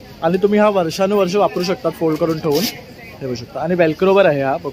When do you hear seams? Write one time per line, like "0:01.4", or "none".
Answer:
none